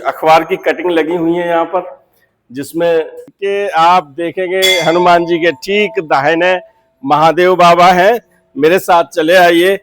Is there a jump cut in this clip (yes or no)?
yes